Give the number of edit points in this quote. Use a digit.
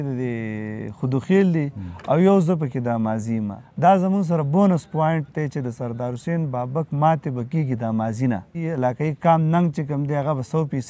2